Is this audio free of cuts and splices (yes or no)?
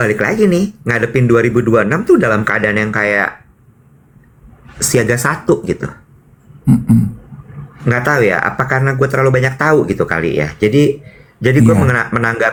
yes